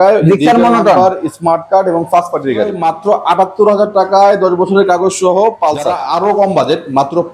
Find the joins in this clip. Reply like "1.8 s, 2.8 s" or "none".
2.8 s, 5.9 s

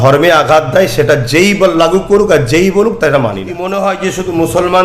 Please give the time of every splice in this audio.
3.6 s

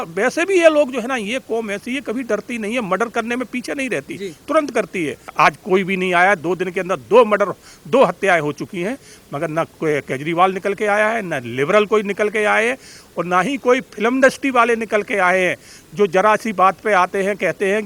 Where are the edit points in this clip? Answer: 5.3 s

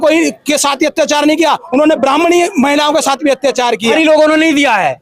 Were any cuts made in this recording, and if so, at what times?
3.9 s

